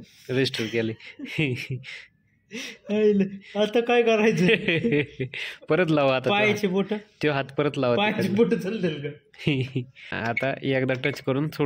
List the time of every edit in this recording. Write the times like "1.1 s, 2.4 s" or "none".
10.0 s